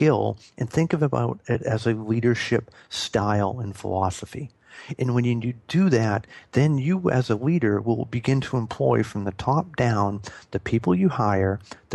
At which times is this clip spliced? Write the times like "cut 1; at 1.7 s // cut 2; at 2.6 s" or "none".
none